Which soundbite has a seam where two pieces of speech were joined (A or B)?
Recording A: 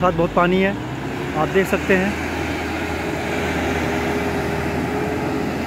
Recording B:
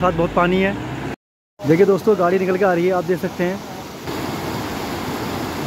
B